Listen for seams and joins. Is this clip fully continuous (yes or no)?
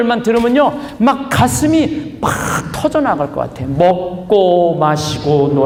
yes